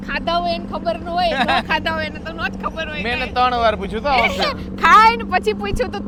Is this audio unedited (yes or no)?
yes